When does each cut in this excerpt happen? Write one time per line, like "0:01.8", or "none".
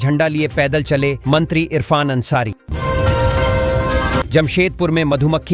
0:02.6
0:04.3

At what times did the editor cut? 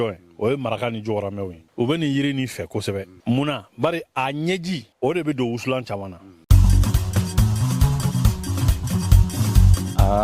0:01.6
0:03.1
0:04.9
0:06.3

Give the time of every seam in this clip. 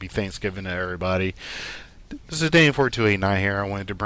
none

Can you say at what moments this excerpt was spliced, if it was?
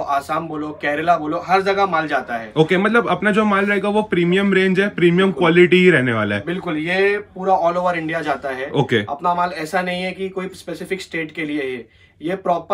none

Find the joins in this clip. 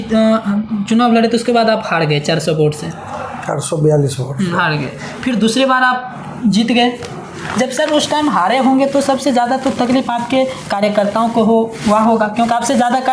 none

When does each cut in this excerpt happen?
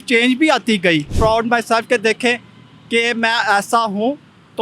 0:01.1

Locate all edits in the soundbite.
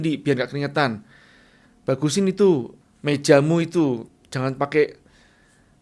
0:04.0

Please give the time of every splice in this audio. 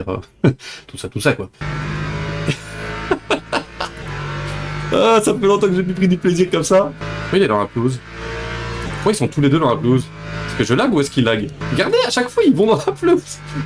0:01.6
0:07.0
0:11.6

